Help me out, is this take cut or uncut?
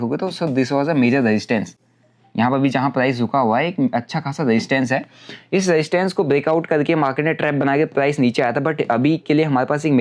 uncut